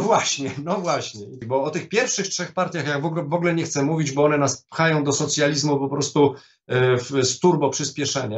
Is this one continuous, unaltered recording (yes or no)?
no